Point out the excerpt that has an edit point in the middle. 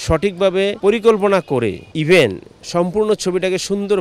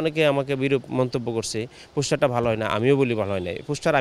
first; 2 cuts; at 0.8 s, 1.9 s

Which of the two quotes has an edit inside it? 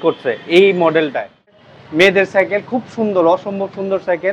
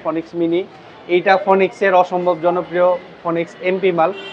first; 1 cut; at 1.5 s

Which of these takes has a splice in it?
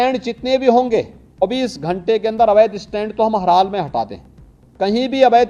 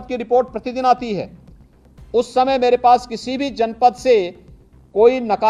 first; 1 cut; at 1.4 s

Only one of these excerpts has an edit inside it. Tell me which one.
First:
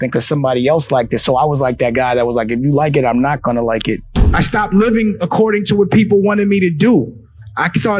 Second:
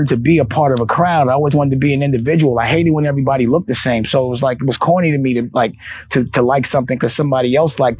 first; 1 cut; at 4.1 s

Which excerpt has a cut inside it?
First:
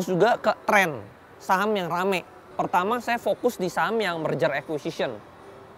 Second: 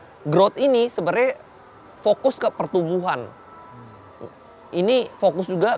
first; 1 cut; at 2.4 s

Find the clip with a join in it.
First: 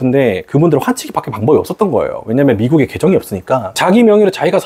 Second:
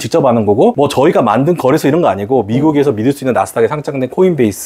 first; 1 cut; at 3.7 s

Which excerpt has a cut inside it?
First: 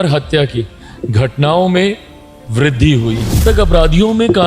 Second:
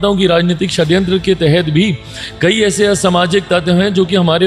first; 1 cut; at 3.4 s

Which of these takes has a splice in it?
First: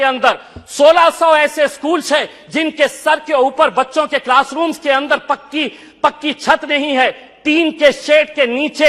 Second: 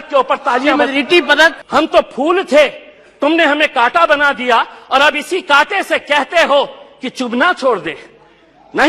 second; 1 cut; at 1.6 s

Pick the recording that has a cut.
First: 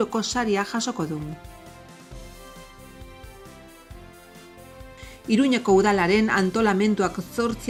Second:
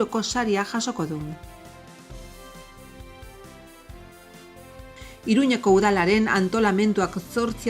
second; 2 cuts; at 1.4 s, 4.9 s

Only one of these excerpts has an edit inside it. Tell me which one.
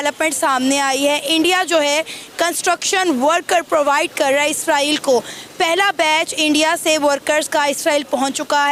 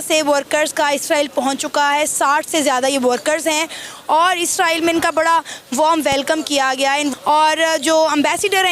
second; 1 cut; at 7.1 s

